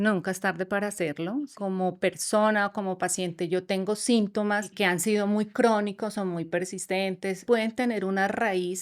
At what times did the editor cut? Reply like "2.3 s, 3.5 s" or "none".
1.5 s, 4.7 s, 7.4 s